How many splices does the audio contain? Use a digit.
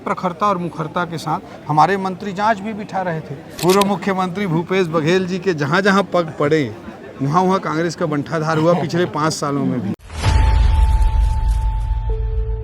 2